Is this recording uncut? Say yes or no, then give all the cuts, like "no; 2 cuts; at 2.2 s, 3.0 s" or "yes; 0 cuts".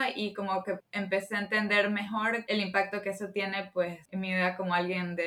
no; 3 cuts; at 0.9 s, 2.4 s, 4.0 s